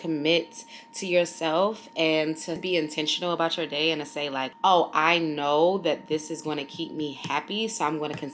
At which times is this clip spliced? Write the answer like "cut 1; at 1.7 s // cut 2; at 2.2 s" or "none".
cut 1; at 4.5 s